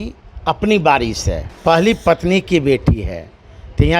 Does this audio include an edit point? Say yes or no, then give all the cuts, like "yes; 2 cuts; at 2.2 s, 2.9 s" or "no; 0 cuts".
yes; 1 cut; at 1.4 s